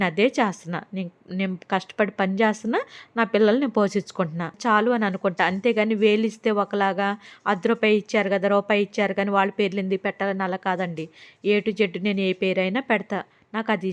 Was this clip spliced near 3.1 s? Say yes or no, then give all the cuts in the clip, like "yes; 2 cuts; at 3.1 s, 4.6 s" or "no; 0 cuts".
no; 1 cut; at 4.6 s